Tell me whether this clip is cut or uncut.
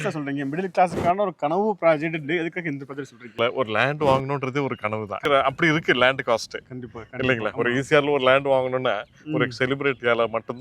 cut